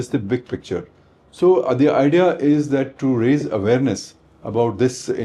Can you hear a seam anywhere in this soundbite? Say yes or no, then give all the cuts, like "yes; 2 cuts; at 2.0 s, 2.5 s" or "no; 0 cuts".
no; 0 cuts